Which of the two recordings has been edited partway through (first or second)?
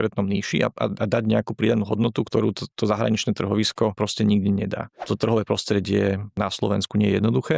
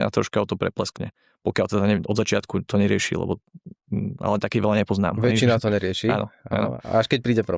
first